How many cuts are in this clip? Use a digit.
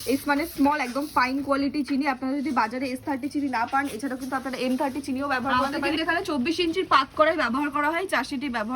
1